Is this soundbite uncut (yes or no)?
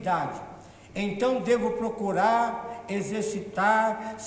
yes